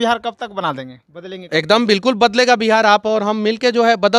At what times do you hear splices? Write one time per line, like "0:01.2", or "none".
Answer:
none